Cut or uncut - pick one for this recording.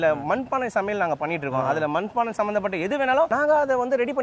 cut